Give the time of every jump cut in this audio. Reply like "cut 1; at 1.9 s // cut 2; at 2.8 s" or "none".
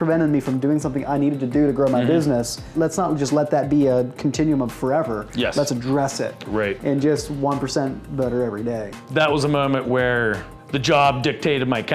none